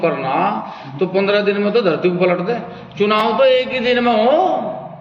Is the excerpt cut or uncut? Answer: uncut